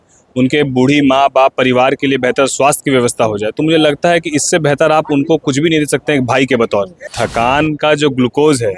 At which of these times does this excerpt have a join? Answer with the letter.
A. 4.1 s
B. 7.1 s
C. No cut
B